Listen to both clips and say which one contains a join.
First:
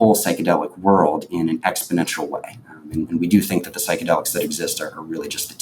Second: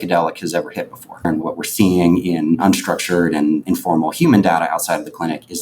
second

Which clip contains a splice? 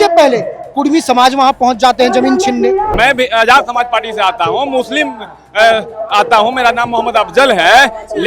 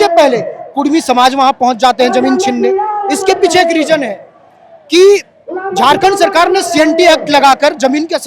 first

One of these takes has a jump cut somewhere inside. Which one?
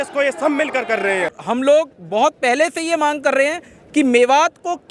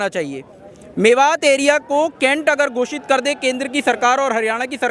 first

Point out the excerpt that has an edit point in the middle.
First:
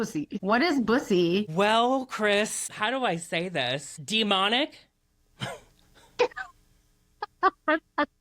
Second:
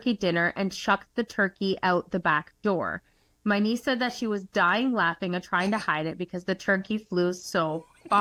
first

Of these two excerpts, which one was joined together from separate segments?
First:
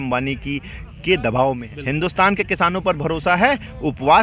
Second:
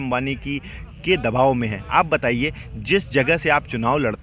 first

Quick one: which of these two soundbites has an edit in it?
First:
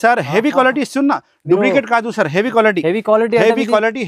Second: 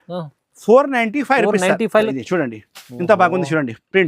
second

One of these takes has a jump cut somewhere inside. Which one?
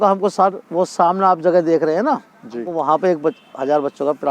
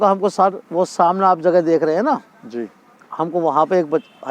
first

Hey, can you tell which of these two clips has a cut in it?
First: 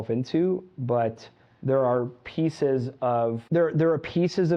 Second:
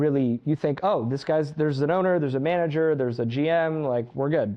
first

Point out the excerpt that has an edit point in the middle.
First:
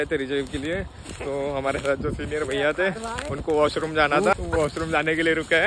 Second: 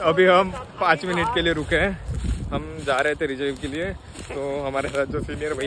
first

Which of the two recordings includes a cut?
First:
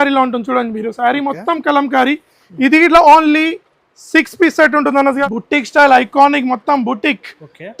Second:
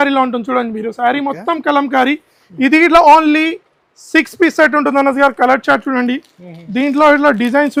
first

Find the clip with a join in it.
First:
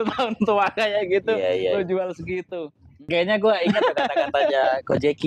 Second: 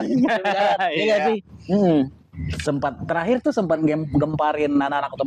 first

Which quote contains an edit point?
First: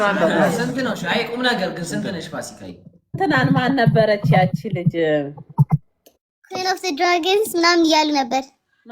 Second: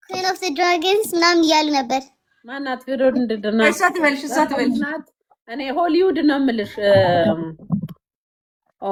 first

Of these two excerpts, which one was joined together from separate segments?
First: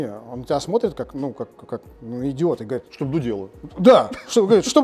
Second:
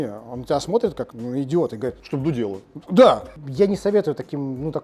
second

